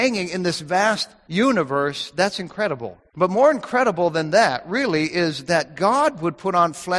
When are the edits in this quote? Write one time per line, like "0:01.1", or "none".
0:01.1
0:03.0